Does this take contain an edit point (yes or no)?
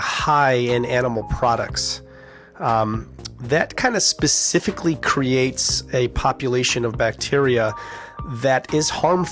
no